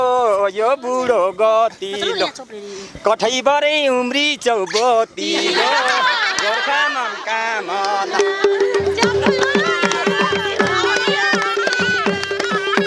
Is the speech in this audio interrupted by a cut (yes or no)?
no